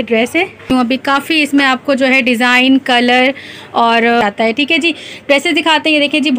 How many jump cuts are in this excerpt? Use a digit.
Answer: 2